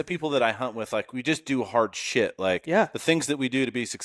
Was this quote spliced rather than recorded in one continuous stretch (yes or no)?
no